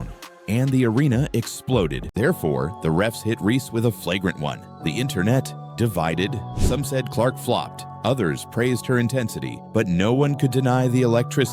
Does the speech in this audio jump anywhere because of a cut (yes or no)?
yes